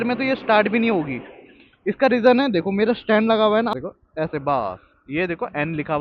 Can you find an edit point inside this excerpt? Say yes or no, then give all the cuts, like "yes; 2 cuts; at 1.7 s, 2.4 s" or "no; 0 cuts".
yes; 1 cut; at 3.7 s